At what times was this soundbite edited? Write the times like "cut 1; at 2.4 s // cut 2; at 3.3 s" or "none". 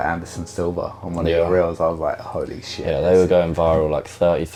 none

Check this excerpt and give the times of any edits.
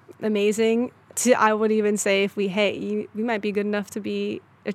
cut 1; at 1.0 s

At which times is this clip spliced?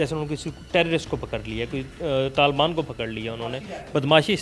none

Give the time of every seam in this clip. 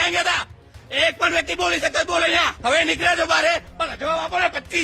cut 1; at 2.5 s

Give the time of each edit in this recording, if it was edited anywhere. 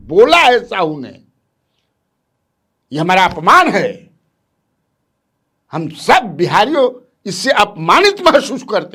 none

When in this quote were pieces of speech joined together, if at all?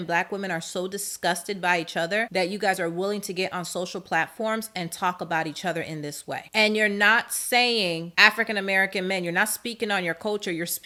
none

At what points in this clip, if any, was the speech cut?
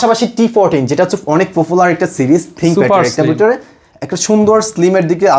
none

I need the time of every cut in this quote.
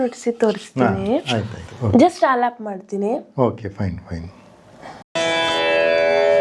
cut 1; at 5.2 s

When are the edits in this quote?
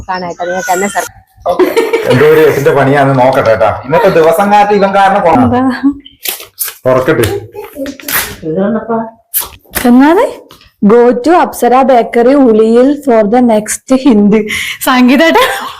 cut 1; at 1.1 s

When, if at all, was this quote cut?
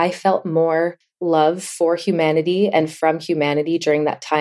cut 1; at 1.1 s

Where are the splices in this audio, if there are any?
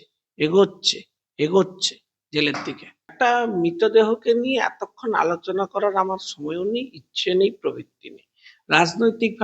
cut 1; at 3.1 s

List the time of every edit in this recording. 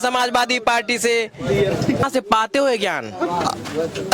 cut 1; at 2.0 s

